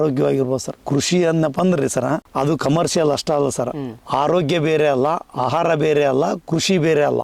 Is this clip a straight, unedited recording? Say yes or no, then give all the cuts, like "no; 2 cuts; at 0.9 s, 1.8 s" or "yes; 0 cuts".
yes; 0 cuts